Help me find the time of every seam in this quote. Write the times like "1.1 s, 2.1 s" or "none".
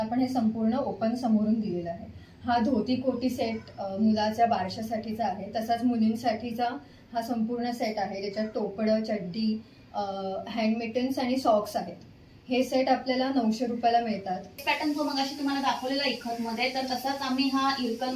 14.5 s